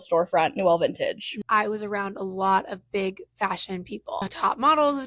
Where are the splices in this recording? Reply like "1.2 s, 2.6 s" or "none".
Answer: 1.3 s, 4.2 s